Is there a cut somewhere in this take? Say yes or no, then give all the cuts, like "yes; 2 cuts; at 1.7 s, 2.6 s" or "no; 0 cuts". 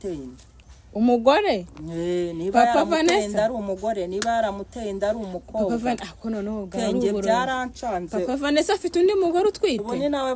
no; 0 cuts